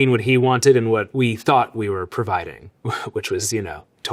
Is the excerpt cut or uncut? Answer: cut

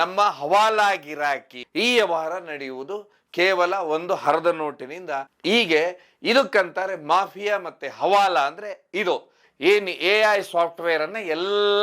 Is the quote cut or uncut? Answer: cut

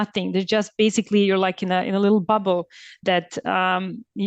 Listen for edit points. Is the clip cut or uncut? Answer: uncut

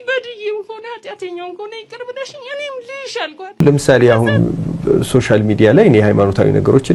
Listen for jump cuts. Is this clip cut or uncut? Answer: cut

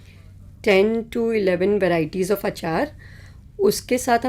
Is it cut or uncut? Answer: uncut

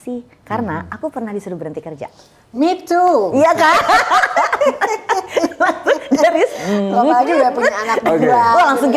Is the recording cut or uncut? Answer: uncut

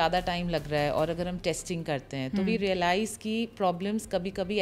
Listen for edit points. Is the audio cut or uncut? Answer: uncut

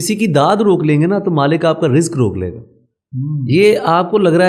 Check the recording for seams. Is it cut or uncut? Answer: uncut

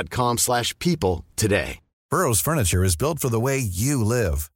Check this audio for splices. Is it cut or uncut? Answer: cut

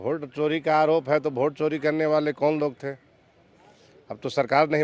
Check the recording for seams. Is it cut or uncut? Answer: uncut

